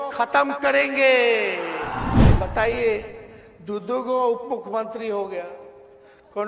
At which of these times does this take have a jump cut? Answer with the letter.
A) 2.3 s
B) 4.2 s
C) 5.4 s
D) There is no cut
A